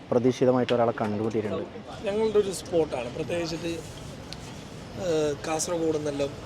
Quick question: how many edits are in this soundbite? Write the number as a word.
one